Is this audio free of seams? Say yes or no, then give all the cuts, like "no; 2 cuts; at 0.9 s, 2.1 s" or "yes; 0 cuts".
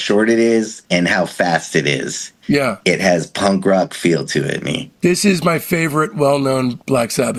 yes; 0 cuts